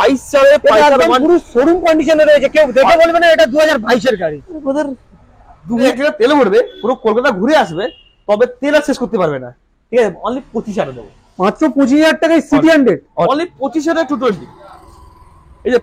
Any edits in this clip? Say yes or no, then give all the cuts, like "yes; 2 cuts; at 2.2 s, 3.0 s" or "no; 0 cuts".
yes; 2 cuts; at 5.9 s, 13.3 s